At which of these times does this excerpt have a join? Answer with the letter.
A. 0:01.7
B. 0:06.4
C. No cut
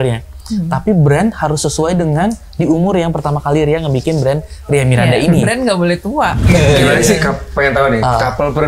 B